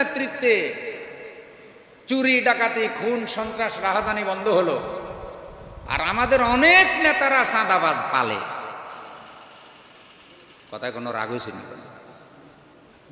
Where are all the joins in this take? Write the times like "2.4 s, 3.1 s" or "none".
none